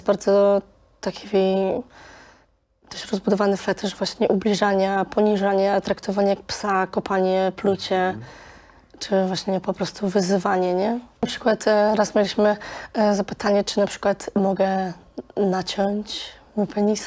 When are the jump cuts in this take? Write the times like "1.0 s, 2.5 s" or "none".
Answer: 11.3 s